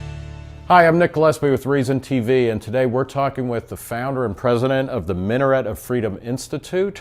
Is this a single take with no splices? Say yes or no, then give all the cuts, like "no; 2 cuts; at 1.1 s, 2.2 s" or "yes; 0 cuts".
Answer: no; 1 cut; at 4.8 s